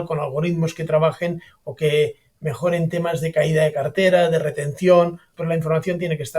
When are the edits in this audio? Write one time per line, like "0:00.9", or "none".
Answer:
0:05.3